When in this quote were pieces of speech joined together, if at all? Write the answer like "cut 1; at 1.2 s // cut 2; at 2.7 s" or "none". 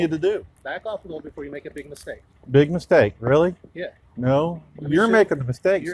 none